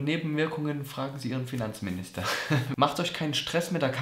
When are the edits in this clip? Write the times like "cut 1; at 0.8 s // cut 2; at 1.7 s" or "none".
cut 1; at 2.7 s